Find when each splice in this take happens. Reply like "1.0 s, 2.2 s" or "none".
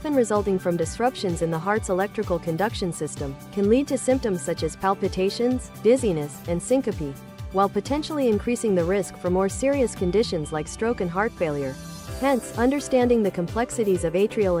none

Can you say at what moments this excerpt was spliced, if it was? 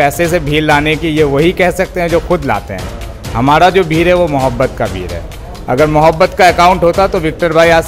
none

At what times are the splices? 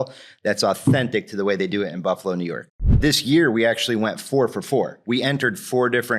3.0 s

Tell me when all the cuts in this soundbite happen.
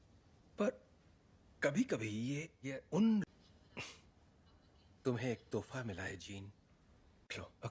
none

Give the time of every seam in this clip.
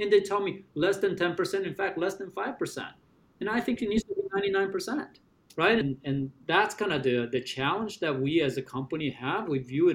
5.8 s

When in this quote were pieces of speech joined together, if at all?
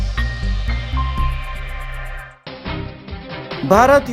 2.3 s

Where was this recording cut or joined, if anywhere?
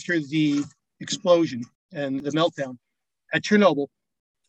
2.2 s

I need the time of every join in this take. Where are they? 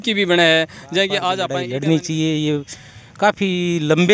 1.5 s

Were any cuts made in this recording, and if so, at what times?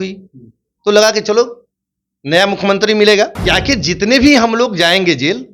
3.4 s

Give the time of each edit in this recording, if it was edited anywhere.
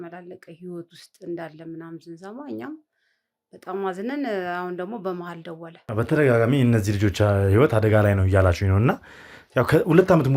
5.7 s

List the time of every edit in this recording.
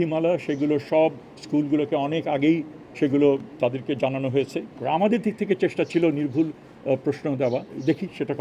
4.7 s

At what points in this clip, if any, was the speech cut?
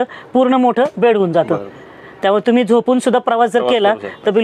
none

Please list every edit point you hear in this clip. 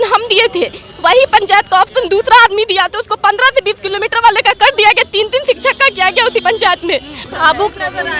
7.2 s

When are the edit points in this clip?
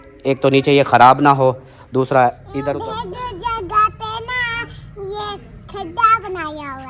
2.7 s

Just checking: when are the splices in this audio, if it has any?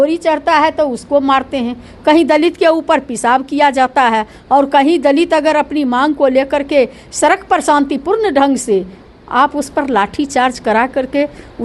9.0 s

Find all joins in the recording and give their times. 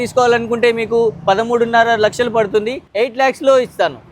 2.8 s

